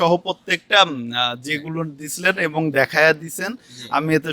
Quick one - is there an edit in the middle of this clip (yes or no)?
no